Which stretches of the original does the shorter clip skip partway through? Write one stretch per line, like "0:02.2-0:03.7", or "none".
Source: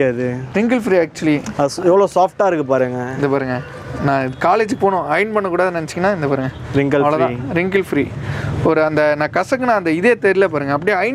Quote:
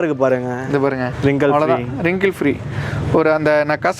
0:03.6-0:06.6